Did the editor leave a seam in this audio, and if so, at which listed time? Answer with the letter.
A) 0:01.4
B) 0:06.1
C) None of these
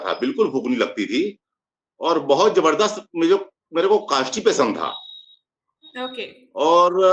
C